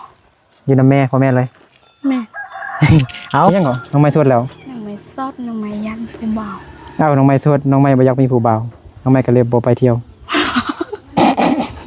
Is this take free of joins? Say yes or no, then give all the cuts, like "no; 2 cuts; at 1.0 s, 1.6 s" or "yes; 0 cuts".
no; 1 cut; at 3.5 s